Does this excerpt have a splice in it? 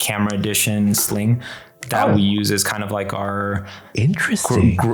no; 0 cuts

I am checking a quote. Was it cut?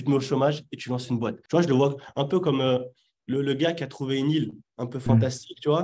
yes; 1 cut; at 1.4 s

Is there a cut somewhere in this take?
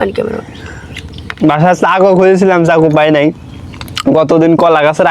yes; 1 cut; at 1.3 s

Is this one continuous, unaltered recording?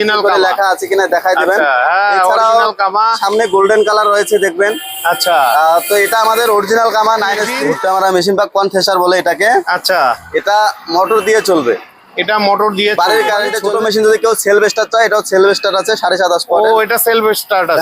no; 2 cuts; at 7.6 s, 13.6 s

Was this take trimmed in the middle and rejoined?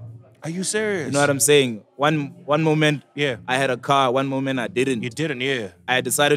no; 0 cuts

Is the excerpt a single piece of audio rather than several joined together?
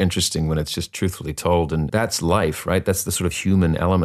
no; 1 cut; at 1.9 s

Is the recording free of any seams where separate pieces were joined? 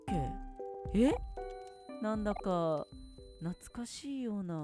yes; 0 cuts

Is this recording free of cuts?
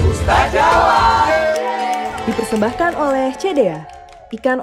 yes; 0 cuts

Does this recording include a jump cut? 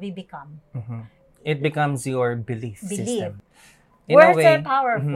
yes; 1 cut; at 3.4 s

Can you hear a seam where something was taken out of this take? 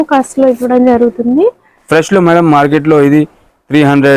no; 0 cuts

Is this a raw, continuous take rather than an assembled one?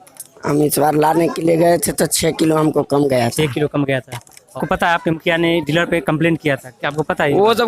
no; 1 cut; at 4.4 s

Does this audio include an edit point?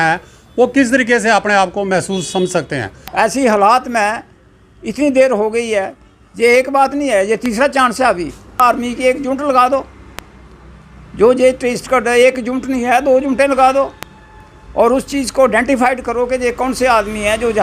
yes; 2 cuts; at 3.0 s, 8.6 s

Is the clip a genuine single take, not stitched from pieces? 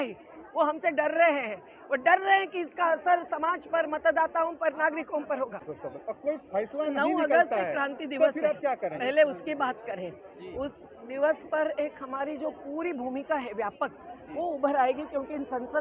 no; 1 cut; at 5.7 s

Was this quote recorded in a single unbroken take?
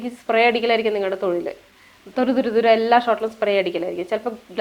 yes; 0 cuts

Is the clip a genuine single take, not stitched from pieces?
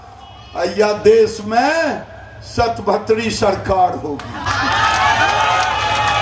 yes; 0 cuts

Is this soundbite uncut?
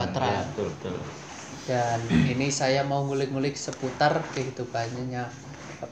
no; 1 cut; at 1.6 s

